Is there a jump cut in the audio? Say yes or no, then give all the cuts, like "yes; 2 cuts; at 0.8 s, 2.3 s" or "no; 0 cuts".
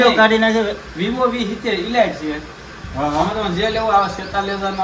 no; 0 cuts